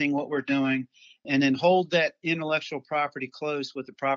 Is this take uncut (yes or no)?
yes